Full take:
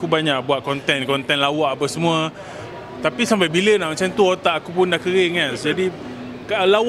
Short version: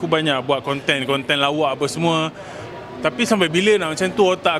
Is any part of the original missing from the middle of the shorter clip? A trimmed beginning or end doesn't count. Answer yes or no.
no